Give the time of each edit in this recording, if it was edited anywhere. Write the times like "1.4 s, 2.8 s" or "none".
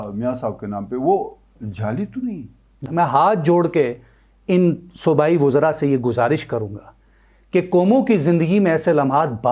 2.7 s